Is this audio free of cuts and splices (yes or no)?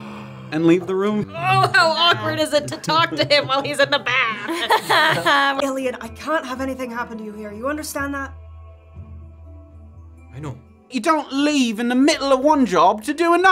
no